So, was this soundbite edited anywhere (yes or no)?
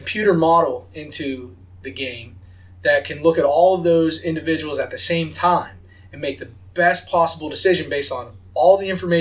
no